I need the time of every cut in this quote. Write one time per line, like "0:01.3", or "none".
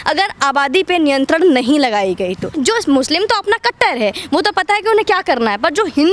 0:02.5